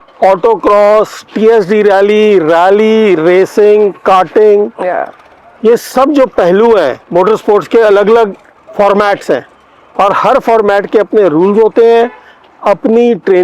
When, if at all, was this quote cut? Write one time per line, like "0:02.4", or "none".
none